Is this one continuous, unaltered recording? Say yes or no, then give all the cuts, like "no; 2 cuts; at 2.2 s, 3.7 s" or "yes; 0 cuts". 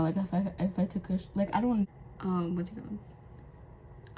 no; 1 cut; at 1.8 s